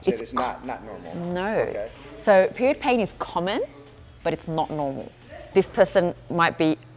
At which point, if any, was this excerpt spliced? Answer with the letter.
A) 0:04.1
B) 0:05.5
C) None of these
B